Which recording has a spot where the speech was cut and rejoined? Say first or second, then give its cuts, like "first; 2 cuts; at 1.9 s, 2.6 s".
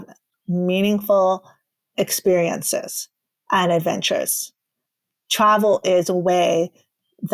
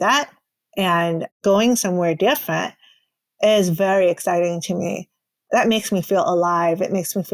second; 1 cut; at 1.3 s